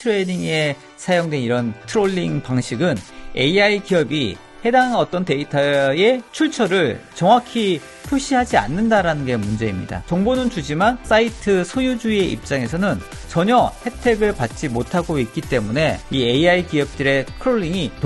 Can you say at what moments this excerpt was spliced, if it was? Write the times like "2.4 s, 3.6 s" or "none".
6.3 s, 10.0 s, 16.0 s